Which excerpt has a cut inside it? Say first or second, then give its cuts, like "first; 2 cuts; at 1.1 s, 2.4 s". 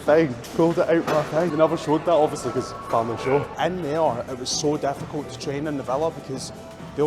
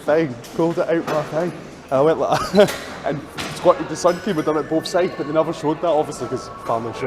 first; 2 cuts; at 1.5 s, 3.5 s